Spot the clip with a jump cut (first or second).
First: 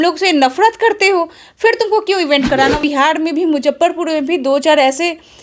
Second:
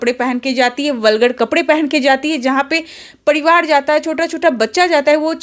first